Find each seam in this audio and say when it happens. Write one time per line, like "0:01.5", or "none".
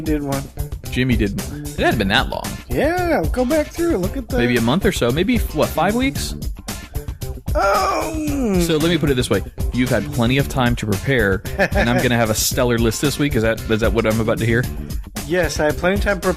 0:04.5